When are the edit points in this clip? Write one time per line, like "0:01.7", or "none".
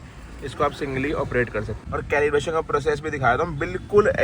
0:01.8